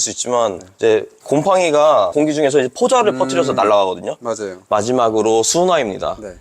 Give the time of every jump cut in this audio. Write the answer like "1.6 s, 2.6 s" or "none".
1.1 s, 2.1 s, 4.5 s